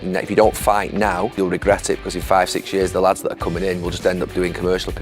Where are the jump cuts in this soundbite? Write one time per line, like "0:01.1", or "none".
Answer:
0:01.3